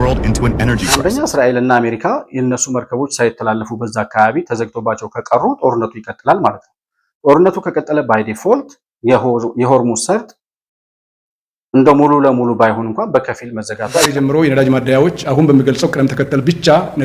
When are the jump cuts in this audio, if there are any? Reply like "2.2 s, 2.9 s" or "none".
1.0 s, 14.1 s